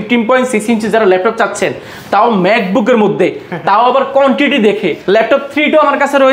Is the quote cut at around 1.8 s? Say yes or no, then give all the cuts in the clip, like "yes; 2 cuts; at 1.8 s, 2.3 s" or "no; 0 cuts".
no; 1 cut; at 5.0 s